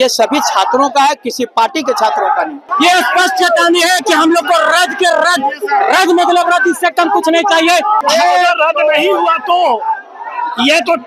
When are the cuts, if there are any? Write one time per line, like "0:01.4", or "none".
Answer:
0:02.6
0:08.0